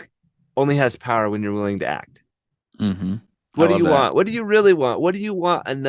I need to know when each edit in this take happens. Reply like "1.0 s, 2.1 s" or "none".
3.4 s